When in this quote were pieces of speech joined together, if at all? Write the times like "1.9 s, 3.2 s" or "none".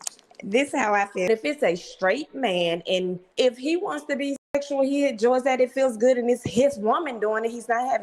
1.3 s, 3.2 s